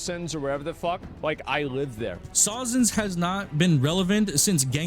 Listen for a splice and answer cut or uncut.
cut